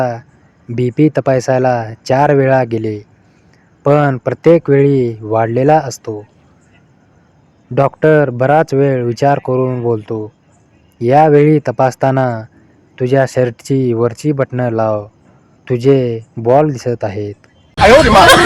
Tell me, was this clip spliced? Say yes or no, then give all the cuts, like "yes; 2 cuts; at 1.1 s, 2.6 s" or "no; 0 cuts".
yes; 1 cut; at 17.2 s